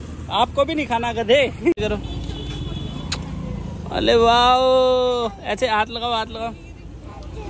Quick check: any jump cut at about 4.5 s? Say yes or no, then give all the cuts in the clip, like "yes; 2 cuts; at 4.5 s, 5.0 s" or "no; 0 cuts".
no; 1 cut; at 1.8 s